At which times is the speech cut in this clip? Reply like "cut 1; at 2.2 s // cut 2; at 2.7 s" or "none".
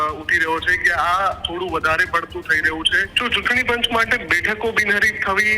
cut 1; at 3.1 s